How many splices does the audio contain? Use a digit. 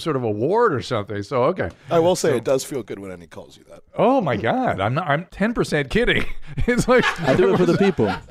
2